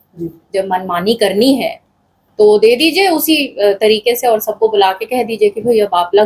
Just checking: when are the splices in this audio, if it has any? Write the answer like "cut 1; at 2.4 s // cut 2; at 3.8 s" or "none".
none